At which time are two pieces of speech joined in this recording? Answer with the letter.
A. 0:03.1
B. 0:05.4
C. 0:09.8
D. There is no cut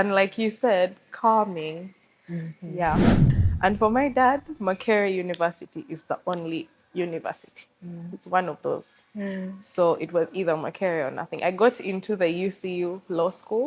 A